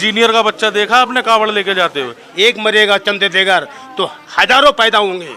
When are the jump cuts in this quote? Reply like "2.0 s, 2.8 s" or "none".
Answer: 2.2 s